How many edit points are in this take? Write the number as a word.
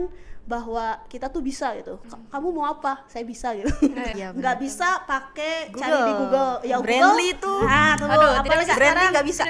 one